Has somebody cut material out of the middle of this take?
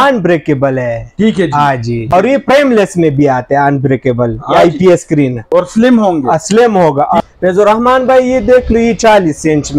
yes; 3 cuts; at 2.1 s, 5.4 s, 7.3 s

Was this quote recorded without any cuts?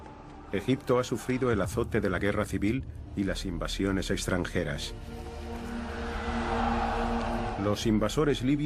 no; 1 cut; at 4.5 s

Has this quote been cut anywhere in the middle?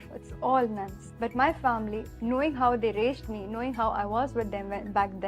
no; 0 cuts

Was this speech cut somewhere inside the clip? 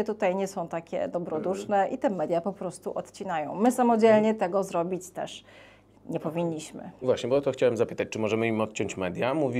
no; 0 cuts

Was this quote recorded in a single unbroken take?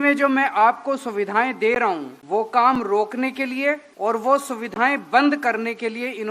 no; 2 cuts; at 2.1 s, 3.9 s

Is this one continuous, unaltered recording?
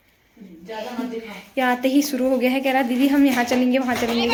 yes; 0 cuts

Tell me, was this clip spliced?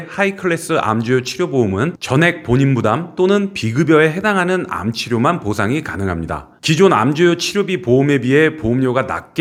no; 0 cuts

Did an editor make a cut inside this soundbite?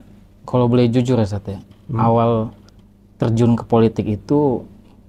no; 0 cuts

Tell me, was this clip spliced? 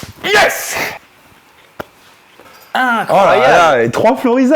yes; 2 cuts; at 1.0 s, 2.4 s

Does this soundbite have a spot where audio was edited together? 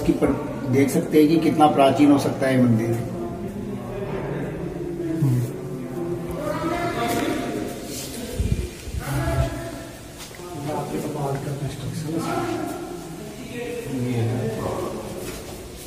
no; 0 cuts

